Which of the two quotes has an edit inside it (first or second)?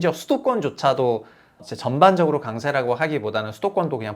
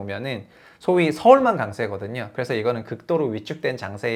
first